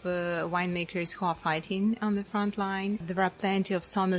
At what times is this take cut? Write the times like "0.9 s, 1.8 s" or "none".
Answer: 3.1 s

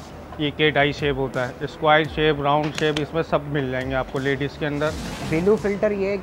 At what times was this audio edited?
5.1 s

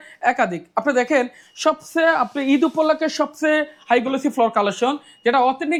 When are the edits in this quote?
none

